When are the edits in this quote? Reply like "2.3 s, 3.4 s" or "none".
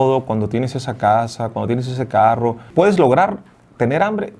2.7 s